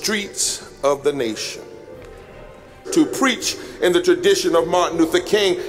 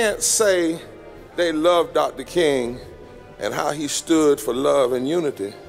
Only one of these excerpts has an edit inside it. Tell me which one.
first; 1 cut; at 2.9 s

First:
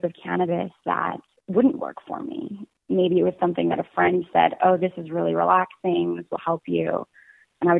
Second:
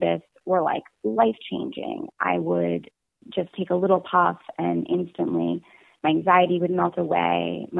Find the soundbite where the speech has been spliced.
first; 2 cuts; at 1.3 s, 2.8 s

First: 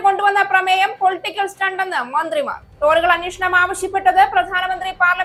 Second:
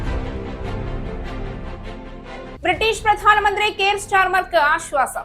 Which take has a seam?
second; 1 cut; at 2.6 s

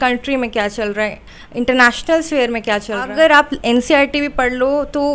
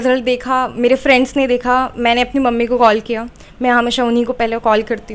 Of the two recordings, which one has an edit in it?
first; 1 cut; at 3.1 s

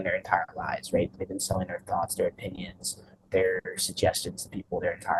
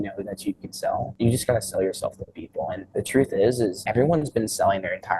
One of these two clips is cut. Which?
second; 3 cuts; at 1.1 s, 2.8 s, 3.8 s

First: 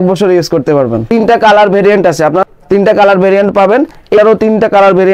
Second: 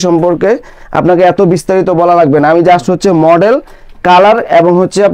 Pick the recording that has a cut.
first; 3 cuts; at 1.0 s, 2.5 s, 4.2 s

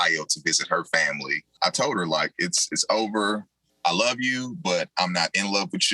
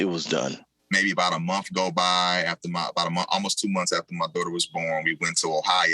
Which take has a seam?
first; 1 cut; at 1.4 s

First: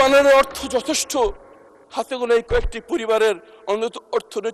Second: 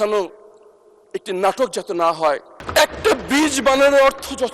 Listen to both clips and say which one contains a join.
second; 1 cut; at 2.6 s

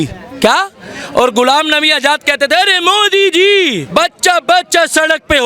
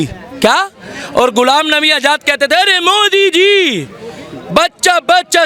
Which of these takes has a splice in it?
first; 1 cut; at 3.8 s

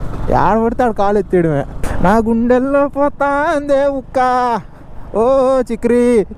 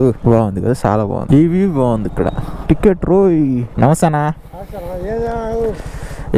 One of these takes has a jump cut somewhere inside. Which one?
second; 2 cuts; at 2.5 s, 3.7 s

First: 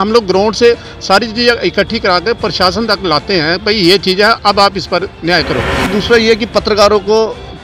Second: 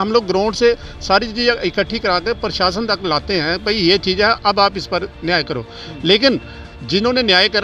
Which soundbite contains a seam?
first; 1 cut; at 5.8 s

